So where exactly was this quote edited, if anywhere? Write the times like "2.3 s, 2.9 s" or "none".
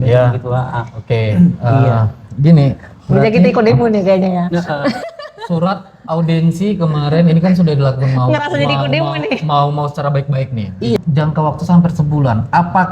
11.0 s